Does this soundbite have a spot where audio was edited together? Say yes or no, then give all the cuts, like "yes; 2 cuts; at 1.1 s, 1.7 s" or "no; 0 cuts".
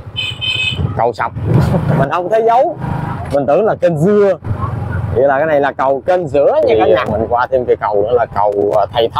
yes; 2 cuts; at 2.0 s, 6.7 s